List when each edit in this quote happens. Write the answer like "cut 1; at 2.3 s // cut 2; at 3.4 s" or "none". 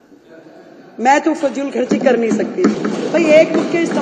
cut 1; at 2.8 s